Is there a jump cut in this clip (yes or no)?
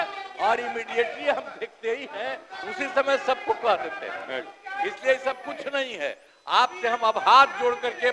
no